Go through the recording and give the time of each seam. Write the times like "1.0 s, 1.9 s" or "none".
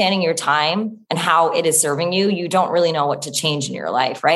1.0 s

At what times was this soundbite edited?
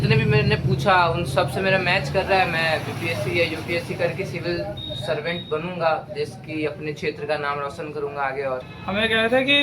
8.7 s

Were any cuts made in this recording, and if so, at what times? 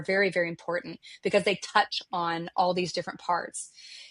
none

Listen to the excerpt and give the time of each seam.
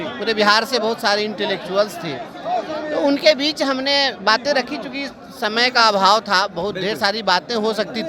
none

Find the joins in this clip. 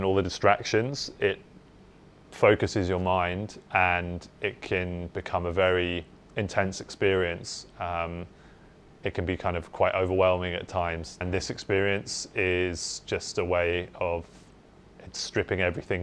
11.2 s

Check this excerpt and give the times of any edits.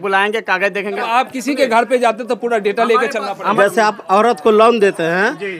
1.0 s, 3.6 s

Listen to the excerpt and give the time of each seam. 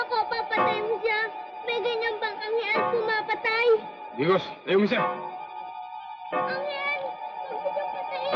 5.5 s

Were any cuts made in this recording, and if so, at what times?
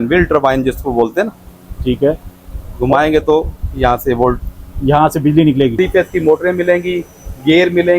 5.7 s

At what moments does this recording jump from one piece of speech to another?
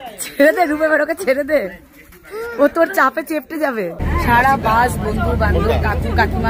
4.0 s

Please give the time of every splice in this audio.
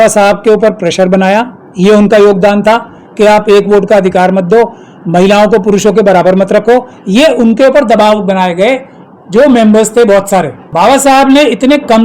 10.6 s

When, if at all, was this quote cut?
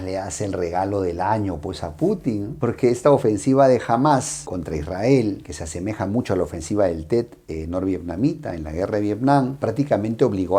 none

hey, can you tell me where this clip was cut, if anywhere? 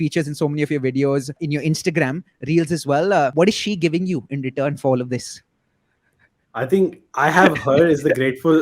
1.4 s, 3.3 s

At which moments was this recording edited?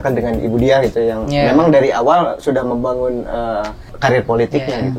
3.8 s

